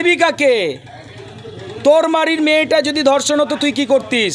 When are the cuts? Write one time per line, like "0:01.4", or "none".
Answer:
none